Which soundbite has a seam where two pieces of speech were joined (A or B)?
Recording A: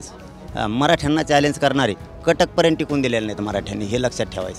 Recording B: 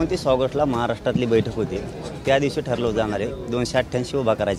A